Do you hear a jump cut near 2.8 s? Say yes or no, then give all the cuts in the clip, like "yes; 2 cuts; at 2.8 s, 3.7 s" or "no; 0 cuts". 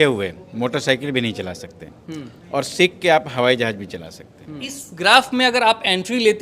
no; 1 cut; at 4.7 s